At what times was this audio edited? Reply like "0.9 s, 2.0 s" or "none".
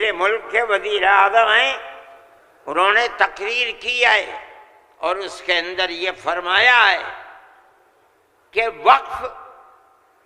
none